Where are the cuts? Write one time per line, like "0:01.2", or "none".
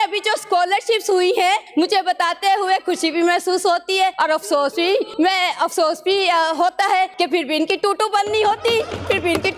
0:01.7
0:04.2
0:05.1
0:07.1